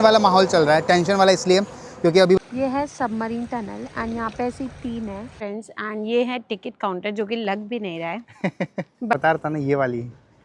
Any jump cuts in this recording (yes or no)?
yes